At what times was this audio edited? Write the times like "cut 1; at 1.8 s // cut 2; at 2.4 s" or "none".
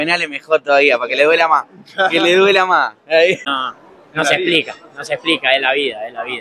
cut 1; at 3.4 s